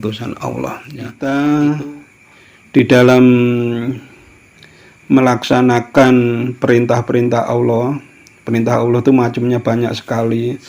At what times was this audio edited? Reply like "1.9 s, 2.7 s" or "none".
1.1 s